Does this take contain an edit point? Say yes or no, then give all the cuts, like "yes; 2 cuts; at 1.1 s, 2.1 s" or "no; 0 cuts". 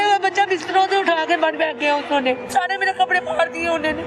yes; 1 cut; at 2.4 s